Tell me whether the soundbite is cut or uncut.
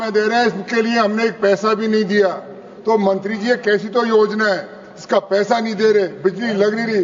uncut